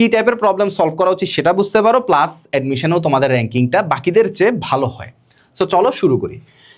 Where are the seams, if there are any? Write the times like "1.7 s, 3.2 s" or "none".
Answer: none

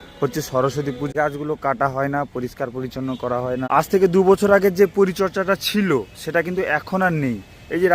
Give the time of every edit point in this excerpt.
1.1 s, 3.6 s

